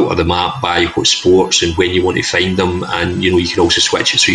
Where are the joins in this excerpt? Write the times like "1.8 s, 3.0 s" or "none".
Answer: none